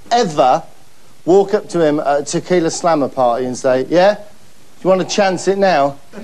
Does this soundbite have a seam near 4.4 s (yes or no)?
no